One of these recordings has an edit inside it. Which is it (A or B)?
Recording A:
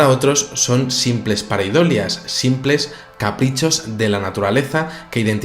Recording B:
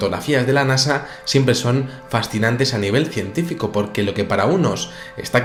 A